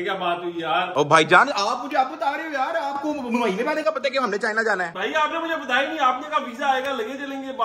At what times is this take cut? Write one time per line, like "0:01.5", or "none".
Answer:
none